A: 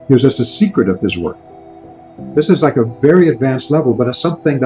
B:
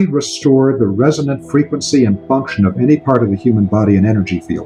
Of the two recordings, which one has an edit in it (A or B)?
A